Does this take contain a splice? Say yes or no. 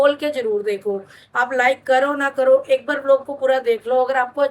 no